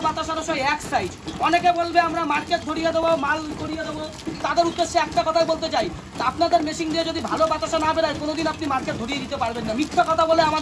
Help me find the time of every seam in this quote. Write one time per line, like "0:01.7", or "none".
none